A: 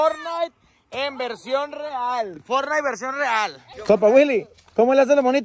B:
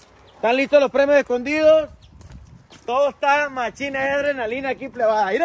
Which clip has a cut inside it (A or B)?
A